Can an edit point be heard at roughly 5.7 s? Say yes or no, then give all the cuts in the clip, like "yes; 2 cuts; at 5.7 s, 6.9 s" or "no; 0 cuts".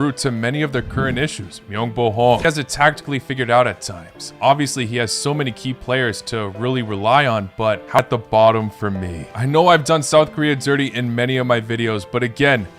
no; 2 cuts; at 2.4 s, 8.0 s